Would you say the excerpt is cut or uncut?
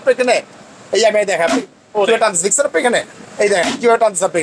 uncut